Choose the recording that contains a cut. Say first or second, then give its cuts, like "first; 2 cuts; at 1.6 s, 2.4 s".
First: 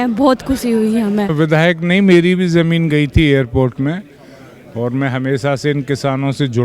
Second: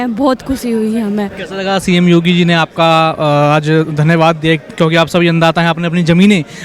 first; 1 cut; at 1.3 s